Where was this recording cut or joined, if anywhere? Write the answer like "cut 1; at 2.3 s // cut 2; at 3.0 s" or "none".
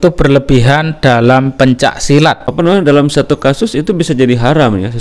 cut 1; at 2.5 s